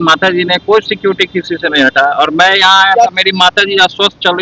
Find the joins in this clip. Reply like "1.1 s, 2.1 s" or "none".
none